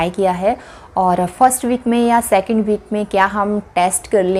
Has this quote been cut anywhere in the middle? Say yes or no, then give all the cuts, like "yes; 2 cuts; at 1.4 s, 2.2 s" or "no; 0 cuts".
no; 0 cuts